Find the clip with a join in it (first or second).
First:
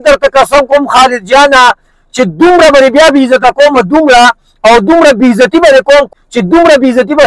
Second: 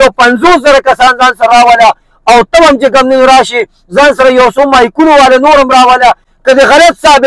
first